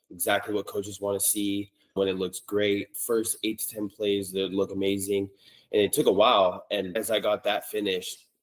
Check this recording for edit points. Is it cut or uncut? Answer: cut